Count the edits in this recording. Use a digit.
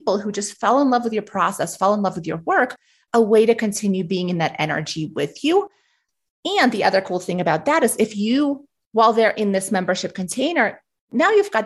0